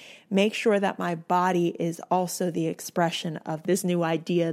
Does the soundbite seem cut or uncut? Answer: cut